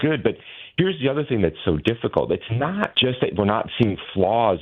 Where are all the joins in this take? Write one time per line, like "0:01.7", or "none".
0:02.9